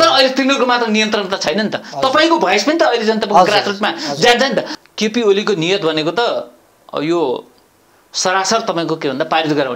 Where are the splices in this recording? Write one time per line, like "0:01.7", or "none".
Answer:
0:04.7

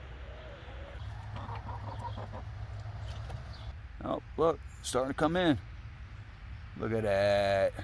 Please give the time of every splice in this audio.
0:01.1
0:03.7

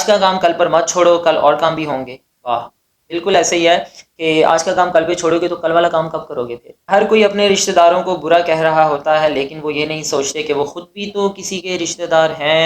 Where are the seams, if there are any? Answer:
0:06.7

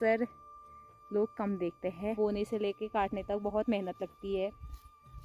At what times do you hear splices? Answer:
0:02.2

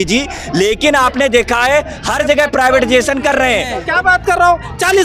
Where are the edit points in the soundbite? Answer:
0:03.8

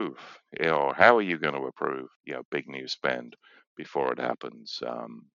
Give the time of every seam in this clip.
0:02.1

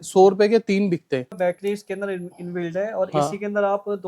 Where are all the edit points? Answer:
0:01.4

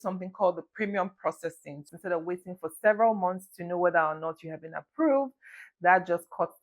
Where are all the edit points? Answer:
0:01.9

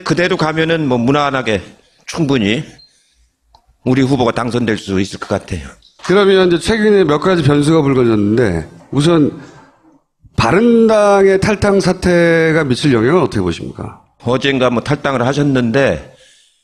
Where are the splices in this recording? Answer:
none

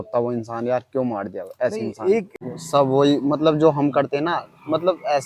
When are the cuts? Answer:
0:02.3

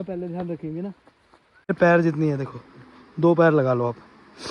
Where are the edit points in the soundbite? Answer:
0:01.7

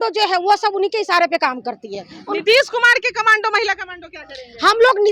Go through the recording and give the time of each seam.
none

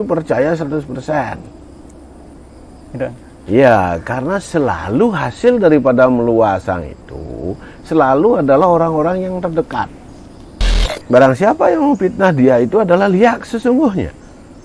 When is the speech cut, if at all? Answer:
0:10.8

